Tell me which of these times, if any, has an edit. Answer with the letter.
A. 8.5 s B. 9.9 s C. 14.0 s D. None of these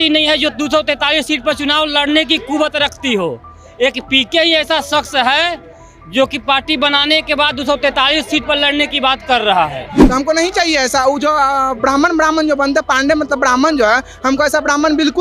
B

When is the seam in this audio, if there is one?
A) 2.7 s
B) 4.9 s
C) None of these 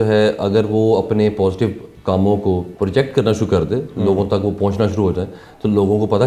A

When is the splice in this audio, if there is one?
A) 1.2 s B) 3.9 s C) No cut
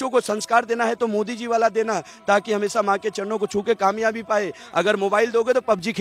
C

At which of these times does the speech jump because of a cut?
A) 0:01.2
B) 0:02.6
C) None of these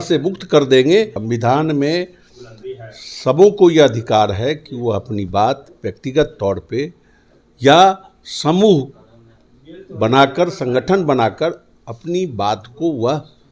A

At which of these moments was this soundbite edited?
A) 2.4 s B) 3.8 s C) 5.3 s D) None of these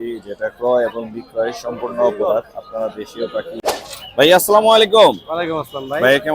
B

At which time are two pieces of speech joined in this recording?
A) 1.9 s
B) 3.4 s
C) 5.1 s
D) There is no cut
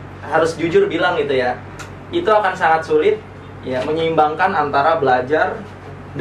D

